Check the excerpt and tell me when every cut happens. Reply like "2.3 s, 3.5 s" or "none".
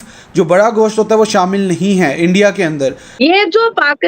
3.0 s